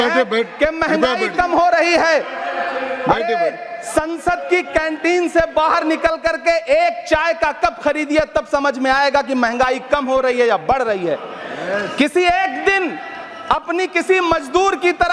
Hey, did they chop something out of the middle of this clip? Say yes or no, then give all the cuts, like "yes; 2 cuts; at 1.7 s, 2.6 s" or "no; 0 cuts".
no; 0 cuts